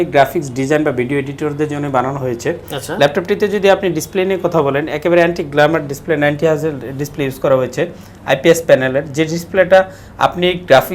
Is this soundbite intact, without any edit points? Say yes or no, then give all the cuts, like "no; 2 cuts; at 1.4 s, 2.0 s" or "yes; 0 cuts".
yes; 0 cuts